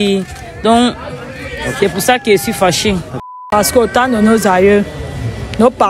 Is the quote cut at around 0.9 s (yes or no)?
no